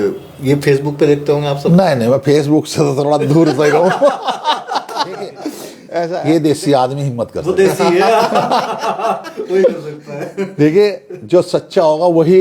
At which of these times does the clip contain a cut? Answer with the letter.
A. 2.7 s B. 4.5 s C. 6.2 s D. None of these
C